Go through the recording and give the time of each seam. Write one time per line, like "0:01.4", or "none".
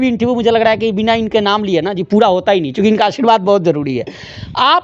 none